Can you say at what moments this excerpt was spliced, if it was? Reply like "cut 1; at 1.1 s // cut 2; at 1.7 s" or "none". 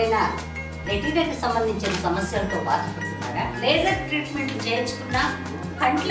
none